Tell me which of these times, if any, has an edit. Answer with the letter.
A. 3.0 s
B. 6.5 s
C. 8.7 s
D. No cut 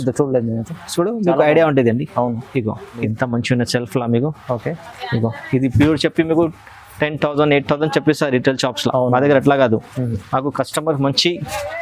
A